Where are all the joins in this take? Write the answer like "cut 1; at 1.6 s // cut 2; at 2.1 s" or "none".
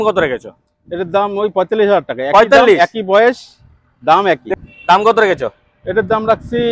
cut 1; at 4.5 s